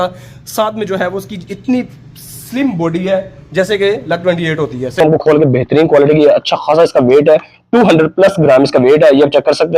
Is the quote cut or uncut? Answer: cut